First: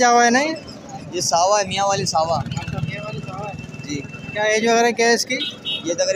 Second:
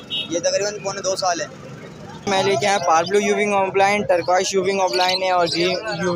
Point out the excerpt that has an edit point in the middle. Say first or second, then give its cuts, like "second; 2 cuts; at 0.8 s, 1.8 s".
second; 1 cut; at 2.3 s